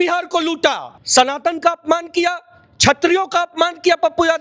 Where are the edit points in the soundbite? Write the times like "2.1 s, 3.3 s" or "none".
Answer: 0.9 s